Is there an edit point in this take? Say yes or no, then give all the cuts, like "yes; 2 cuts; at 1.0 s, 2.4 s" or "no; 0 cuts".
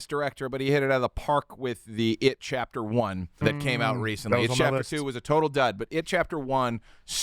yes; 1 cut; at 3.4 s